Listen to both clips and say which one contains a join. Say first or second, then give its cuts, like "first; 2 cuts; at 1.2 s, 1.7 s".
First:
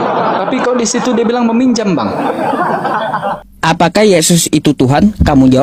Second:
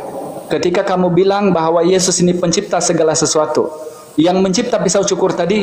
first; 1 cut; at 3.4 s